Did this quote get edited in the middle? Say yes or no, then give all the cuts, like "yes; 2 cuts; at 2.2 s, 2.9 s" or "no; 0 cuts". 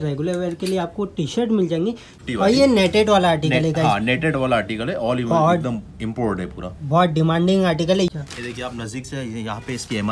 yes; 2 cuts; at 2.1 s, 8.1 s